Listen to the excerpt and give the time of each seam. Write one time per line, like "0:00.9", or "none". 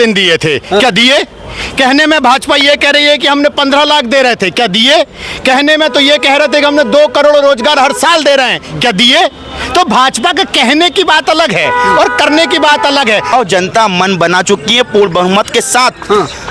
0:13.3